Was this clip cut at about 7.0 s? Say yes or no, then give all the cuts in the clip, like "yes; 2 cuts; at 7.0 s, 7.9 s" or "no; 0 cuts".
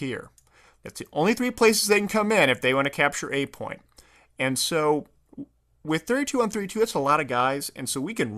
yes; 1 cut; at 7.0 s